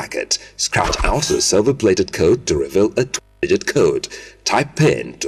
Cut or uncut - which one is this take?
uncut